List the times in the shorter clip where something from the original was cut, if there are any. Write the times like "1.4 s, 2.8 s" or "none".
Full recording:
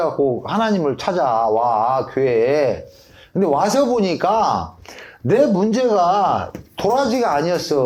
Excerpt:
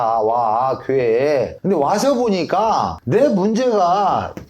1.5 s, 3.0 s